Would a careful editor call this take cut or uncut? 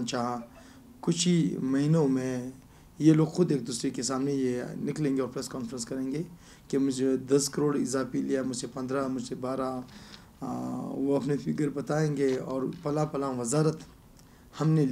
uncut